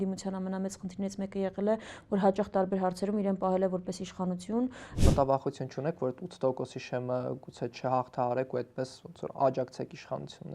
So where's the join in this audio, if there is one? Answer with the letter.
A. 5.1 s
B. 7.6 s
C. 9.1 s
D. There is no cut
A